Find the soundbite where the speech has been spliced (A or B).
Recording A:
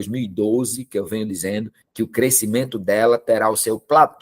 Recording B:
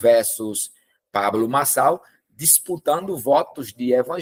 A